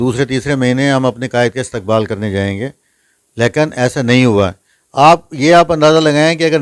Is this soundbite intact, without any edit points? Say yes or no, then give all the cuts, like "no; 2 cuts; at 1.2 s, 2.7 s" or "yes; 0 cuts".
yes; 0 cuts